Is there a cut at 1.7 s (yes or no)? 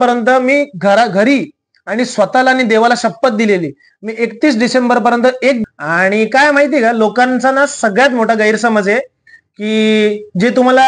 no